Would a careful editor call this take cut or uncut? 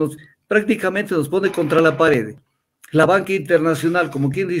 uncut